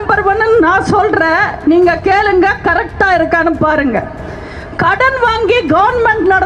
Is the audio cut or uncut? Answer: uncut